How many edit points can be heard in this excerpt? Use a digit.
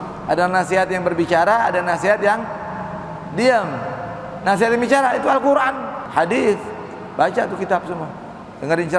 1